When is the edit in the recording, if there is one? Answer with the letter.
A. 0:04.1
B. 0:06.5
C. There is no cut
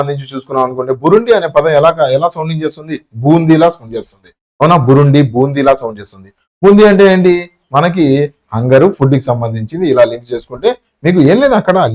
C